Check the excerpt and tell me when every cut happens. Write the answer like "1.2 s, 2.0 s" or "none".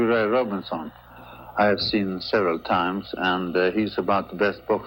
none